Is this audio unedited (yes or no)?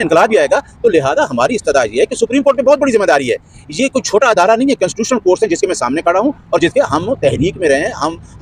yes